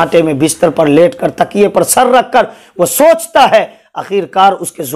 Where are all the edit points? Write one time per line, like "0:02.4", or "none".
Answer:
none